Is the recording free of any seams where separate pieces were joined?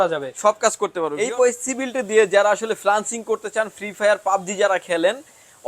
no; 1 cut; at 1.1 s

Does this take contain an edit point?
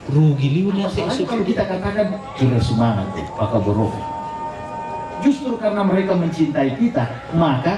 yes; 1 cut; at 1.0 s

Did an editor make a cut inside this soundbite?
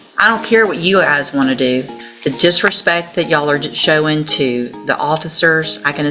yes; 1 cut; at 2.0 s

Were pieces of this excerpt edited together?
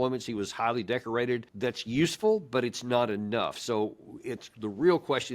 yes; 1 cut; at 1.5 s

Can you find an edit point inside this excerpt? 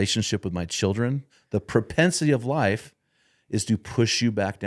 yes; 1 cut; at 1.3 s

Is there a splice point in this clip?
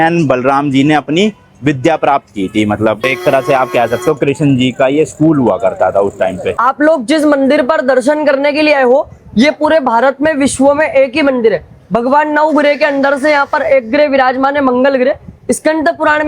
yes; 2 cuts; at 3.0 s, 6.6 s

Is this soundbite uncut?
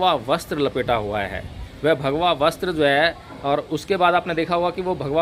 yes; 0 cuts

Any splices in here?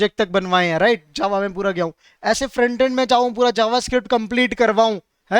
no; 0 cuts

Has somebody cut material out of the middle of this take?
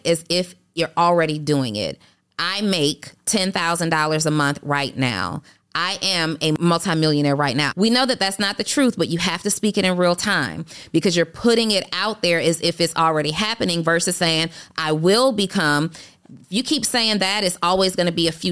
yes; 2 cuts; at 6.6 s, 7.7 s

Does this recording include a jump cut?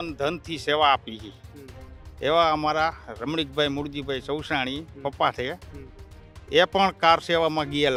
no; 0 cuts

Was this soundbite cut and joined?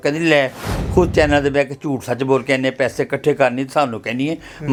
no; 0 cuts

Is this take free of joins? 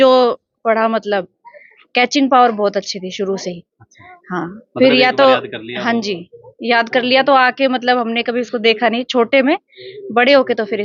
yes; 0 cuts

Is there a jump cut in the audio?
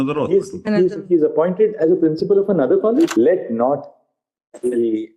yes; 1 cut; at 3.1 s

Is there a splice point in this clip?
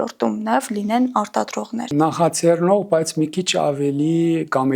yes; 1 cut; at 1.9 s

